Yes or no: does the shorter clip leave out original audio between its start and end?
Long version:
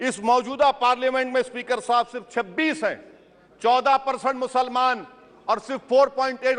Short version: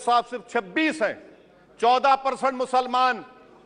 no